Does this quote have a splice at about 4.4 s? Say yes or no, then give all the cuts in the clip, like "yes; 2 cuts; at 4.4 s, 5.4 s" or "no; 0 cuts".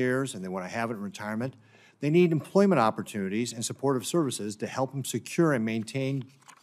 yes; 1 cut; at 4.4 s